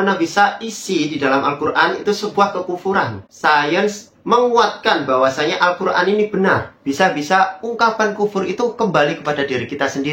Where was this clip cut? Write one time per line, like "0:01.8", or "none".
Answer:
0:03.2
0:06.8